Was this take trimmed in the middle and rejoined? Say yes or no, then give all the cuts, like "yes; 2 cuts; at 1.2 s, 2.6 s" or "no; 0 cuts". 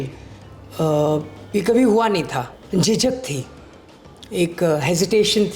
yes; 1 cut; at 2.6 s